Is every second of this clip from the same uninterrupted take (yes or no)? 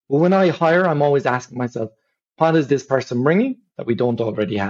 yes